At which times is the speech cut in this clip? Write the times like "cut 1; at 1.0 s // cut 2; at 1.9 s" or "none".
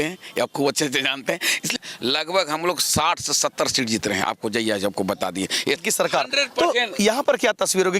cut 1; at 1.8 s // cut 2; at 5.8 s